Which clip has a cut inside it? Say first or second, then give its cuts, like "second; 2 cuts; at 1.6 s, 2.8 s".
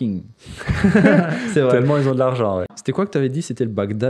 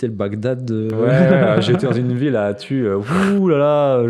first; 1 cut; at 2.6 s